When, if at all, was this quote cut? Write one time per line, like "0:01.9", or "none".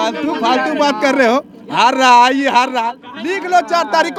none